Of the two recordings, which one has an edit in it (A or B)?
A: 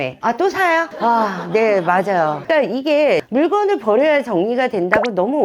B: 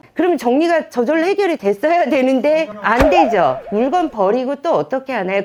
A